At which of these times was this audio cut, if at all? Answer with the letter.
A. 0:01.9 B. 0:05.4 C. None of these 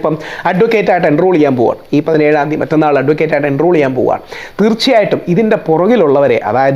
C